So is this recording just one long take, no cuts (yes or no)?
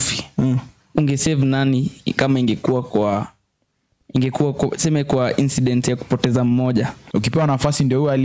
no